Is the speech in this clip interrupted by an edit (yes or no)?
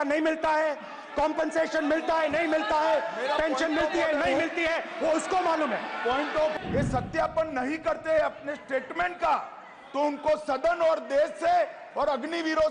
yes